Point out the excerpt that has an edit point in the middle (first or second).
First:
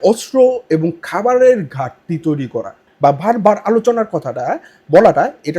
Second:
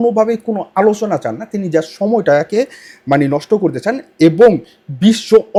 first